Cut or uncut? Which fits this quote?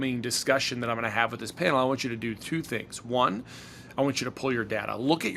uncut